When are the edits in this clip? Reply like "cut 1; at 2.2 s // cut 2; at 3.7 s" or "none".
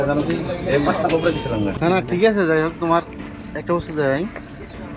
cut 1; at 1.7 s